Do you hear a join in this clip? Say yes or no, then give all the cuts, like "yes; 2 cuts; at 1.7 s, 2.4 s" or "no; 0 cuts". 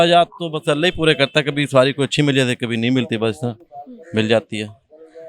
no; 0 cuts